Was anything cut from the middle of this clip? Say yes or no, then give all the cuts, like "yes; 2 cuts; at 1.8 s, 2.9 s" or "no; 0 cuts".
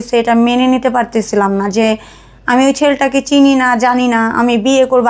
no; 0 cuts